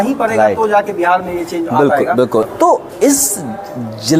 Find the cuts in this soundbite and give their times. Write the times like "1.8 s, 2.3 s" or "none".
2.5 s